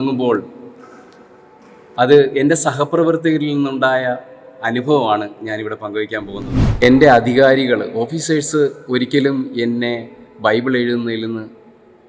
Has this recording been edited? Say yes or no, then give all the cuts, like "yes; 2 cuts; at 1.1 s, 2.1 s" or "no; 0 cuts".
yes; 1 cut; at 6.6 s